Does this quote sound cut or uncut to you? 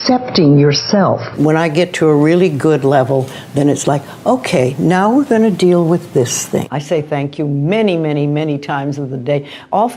cut